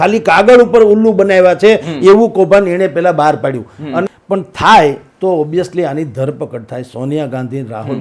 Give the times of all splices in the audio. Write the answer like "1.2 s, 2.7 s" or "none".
4.0 s